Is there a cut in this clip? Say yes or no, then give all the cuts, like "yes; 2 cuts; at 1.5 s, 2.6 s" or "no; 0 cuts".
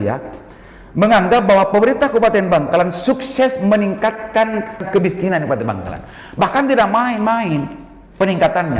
yes; 1 cut; at 4.8 s